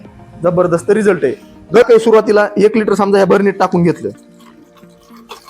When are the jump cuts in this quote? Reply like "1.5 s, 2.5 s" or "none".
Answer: 1.8 s